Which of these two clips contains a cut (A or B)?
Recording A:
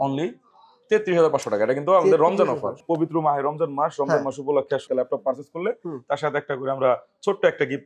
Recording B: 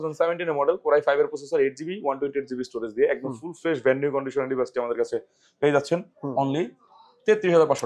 A